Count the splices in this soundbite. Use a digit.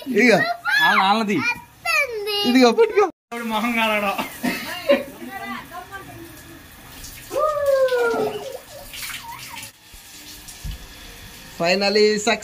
2